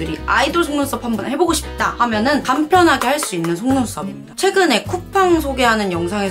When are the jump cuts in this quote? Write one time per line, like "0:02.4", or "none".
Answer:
0:04.3